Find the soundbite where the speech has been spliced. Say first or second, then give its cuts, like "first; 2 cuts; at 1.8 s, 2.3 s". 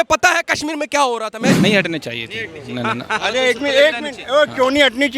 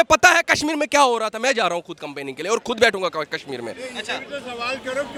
first; 1 cut; at 1.5 s